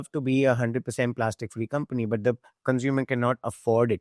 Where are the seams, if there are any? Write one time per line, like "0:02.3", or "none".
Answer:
none